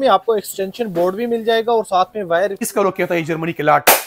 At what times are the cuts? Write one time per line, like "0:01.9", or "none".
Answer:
0:02.7